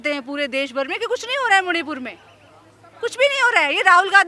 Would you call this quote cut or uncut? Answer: uncut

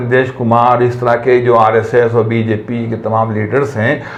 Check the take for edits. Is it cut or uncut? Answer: uncut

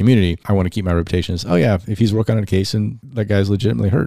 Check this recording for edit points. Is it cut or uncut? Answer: cut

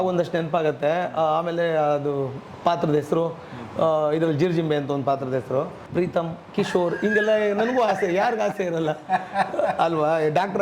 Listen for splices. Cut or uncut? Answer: cut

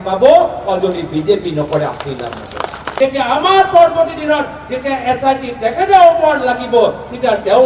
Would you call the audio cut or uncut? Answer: cut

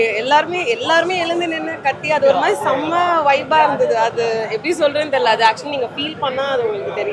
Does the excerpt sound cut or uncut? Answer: uncut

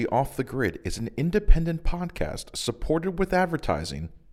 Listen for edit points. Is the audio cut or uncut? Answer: uncut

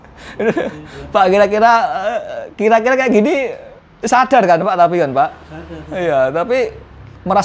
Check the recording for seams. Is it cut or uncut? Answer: uncut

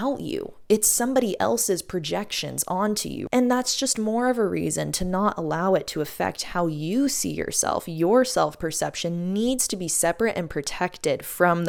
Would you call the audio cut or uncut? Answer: uncut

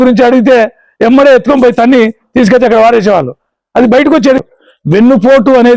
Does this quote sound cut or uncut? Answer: cut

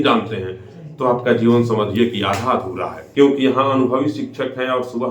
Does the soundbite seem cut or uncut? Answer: cut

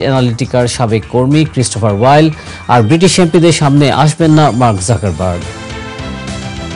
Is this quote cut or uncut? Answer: cut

